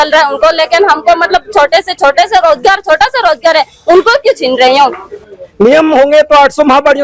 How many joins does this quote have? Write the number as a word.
one